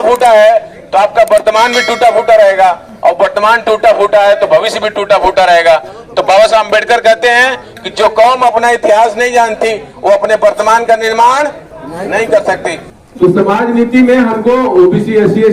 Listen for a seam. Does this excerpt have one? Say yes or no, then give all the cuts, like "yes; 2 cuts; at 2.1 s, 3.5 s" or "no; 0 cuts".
no; 0 cuts